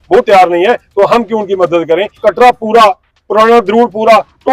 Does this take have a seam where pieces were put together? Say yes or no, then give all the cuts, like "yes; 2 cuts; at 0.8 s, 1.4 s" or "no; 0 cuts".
yes; 1 cut; at 2.2 s